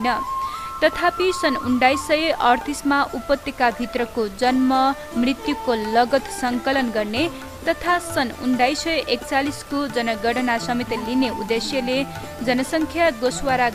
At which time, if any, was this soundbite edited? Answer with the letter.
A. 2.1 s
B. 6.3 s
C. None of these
C